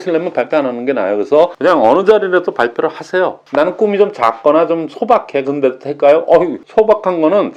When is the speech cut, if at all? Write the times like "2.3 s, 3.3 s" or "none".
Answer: 1.5 s, 3.4 s, 6.6 s